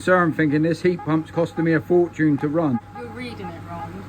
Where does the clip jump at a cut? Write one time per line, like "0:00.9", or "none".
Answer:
0:02.8